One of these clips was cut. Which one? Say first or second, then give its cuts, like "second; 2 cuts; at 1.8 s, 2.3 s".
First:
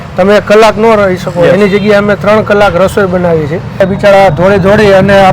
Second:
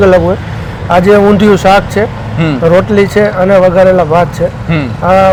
first; 1 cut; at 3.7 s